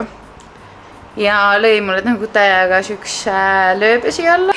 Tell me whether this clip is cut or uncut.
uncut